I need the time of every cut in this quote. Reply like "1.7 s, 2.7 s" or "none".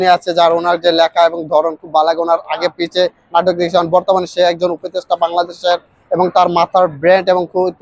none